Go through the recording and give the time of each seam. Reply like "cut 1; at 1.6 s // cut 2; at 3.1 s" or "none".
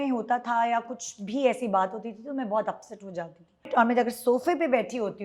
cut 1; at 3.7 s